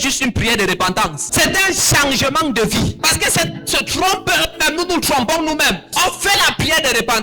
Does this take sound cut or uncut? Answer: cut